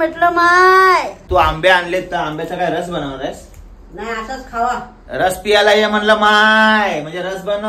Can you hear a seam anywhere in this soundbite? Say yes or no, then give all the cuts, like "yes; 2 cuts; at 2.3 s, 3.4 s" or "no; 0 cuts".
yes; 1 cut; at 1.2 s